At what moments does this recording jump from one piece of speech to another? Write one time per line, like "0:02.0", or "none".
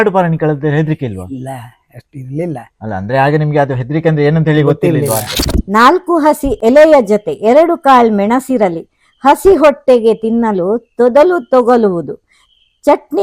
0:05.3